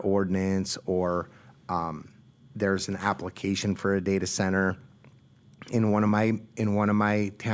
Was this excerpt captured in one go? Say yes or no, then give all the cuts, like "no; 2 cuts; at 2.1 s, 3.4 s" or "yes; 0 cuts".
yes; 0 cuts